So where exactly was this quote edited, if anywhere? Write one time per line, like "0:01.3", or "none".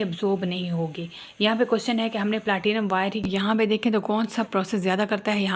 0:03.2